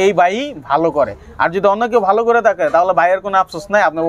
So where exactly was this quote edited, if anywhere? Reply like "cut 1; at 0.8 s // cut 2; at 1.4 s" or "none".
none